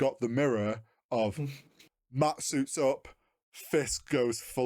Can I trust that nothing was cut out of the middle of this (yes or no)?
yes